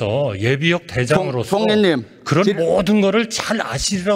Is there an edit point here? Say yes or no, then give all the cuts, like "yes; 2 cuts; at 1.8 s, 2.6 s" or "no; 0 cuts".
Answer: no; 0 cuts